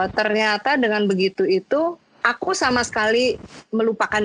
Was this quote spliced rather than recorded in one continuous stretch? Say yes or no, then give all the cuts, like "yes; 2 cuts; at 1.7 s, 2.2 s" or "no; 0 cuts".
no; 0 cuts